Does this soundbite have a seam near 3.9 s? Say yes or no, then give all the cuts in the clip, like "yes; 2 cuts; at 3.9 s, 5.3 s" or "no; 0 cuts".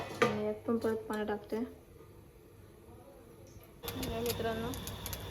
yes; 1 cut; at 3.9 s